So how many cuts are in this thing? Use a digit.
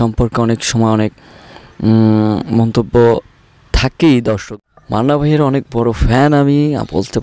1